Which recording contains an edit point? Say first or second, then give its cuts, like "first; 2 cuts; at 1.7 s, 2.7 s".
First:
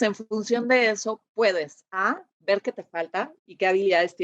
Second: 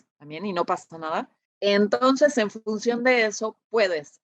second; 1 cut; at 1.4 s